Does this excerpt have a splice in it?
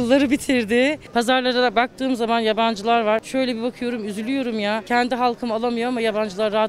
yes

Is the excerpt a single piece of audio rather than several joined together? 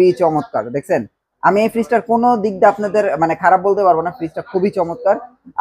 yes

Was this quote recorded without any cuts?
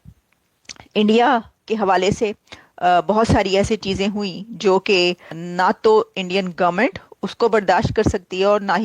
no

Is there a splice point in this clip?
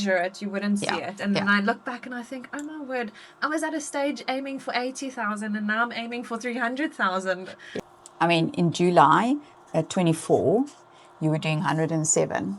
yes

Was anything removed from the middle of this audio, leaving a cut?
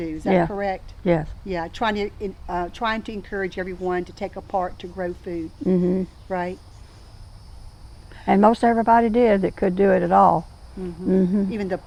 no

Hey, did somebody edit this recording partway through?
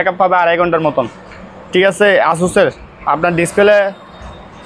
no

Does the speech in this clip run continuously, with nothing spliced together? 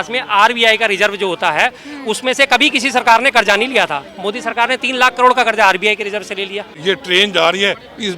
no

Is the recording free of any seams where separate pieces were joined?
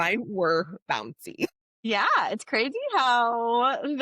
no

